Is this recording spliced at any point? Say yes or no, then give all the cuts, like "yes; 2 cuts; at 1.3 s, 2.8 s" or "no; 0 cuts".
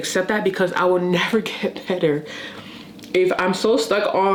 no; 0 cuts